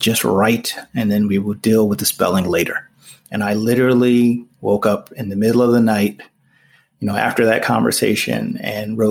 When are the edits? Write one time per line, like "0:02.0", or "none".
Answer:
none